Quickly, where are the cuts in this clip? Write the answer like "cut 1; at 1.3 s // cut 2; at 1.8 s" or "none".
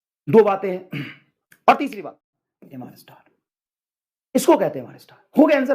cut 1; at 2.0 s